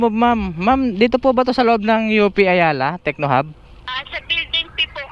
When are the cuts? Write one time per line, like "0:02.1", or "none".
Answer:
0:03.9